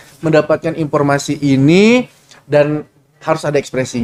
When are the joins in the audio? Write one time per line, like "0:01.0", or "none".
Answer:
none